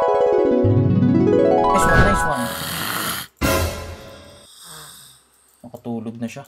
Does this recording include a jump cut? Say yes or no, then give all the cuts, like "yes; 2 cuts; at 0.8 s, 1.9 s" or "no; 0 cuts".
no; 0 cuts